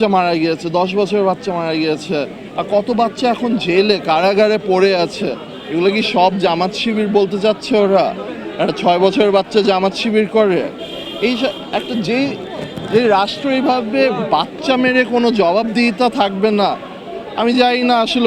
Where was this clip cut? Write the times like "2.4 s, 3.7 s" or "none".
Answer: none